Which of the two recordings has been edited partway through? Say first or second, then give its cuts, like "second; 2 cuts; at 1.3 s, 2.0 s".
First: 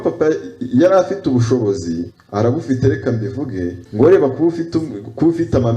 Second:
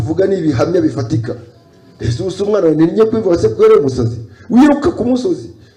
first; 2 cuts; at 2.2 s, 3.8 s